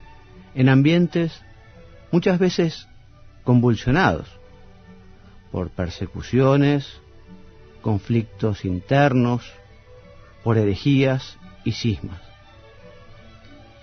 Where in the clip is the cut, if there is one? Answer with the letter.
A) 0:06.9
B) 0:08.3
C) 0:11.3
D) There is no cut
D